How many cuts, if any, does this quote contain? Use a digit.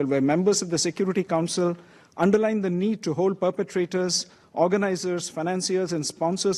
0